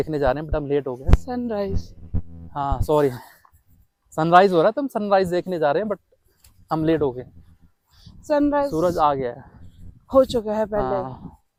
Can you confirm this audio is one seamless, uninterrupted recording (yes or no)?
yes